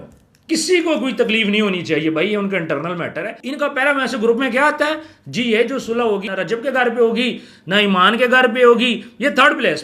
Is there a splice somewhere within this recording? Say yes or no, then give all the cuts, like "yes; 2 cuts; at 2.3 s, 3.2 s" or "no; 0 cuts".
yes; 2 cuts; at 3.4 s, 6.3 s